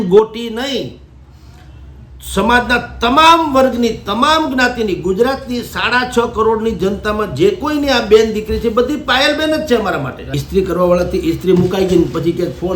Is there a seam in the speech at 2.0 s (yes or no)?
no